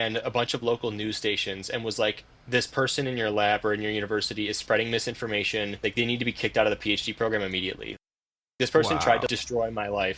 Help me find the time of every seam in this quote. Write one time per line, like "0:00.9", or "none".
none